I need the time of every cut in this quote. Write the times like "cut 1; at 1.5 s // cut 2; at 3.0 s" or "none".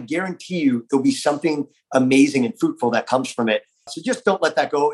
cut 1; at 3.9 s